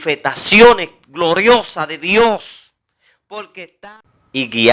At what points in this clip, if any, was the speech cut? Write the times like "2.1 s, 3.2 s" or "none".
3.8 s